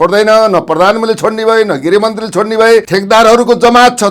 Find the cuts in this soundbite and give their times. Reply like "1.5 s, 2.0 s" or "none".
2.9 s